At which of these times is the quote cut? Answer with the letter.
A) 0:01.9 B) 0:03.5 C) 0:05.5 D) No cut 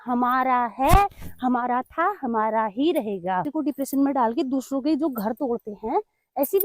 B